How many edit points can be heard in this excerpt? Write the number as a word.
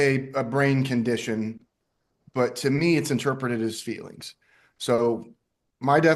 zero